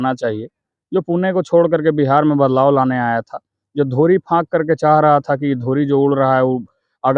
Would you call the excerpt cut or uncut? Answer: uncut